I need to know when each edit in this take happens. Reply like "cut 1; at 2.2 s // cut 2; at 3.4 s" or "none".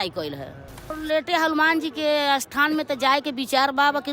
cut 1; at 0.9 s